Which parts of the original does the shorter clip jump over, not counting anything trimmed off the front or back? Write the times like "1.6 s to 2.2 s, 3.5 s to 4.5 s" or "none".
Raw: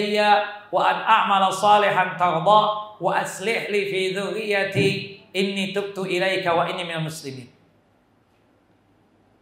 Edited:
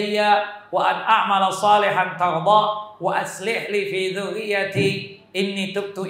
none